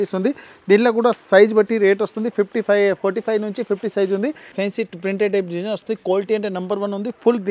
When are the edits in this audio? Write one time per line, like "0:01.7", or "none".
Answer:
0:04.5